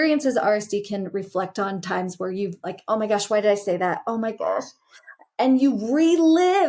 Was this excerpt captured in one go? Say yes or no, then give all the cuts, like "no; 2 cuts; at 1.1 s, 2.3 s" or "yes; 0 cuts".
yes; 0 cuts